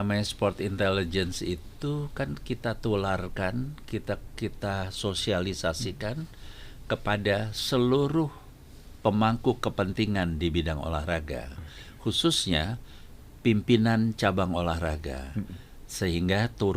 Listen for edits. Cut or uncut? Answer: uncut